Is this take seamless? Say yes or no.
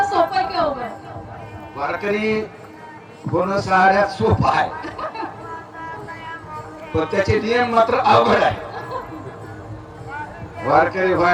yes